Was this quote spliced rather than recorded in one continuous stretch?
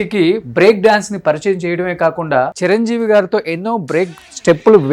yes; 1 cut; at 2.5 s

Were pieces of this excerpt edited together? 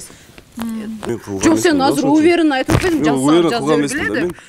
yes; 1 cut; at 1.0 s

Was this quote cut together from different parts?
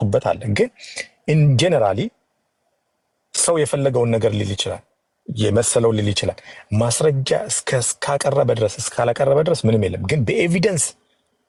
no; 0 cuts

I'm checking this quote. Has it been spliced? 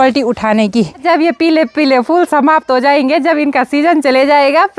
yes; 1 cut; at 1.0 s

